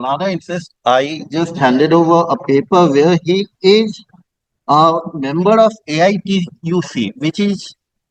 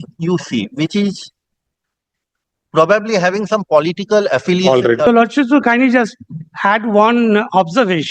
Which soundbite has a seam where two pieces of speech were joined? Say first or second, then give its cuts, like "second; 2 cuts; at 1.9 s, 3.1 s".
second; 1 cut; at 5.1 s